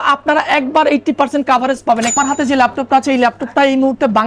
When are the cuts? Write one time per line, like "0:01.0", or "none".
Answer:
0:02.1